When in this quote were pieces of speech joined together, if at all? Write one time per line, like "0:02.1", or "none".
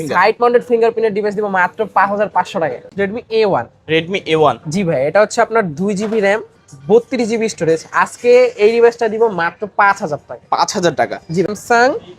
0:02.9
0:11.5